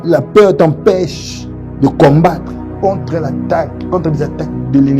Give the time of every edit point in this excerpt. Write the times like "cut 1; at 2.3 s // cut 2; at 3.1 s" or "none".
none